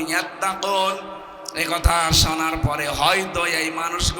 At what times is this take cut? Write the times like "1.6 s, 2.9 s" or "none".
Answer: none